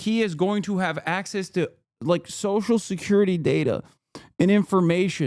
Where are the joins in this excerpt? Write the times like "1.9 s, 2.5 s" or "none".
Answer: none